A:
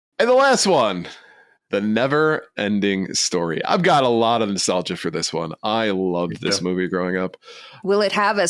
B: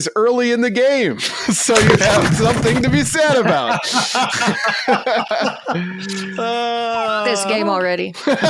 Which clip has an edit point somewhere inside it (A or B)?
A